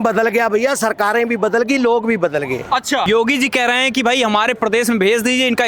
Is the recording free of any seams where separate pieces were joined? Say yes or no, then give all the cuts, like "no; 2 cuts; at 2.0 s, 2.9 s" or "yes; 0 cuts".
no; 1 cut; at 3.0 s